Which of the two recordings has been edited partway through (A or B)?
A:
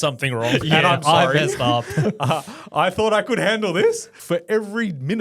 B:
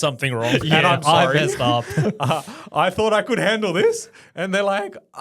A